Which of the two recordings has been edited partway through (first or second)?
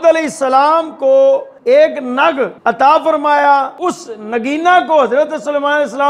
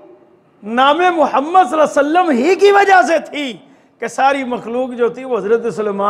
first